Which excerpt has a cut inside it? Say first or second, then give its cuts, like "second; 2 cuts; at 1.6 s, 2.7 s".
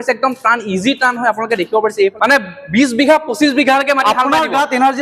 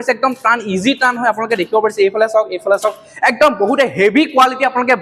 first; 1 cut; at 2.1 s